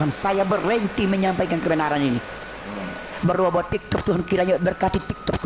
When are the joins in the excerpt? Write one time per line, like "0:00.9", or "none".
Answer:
0:03.0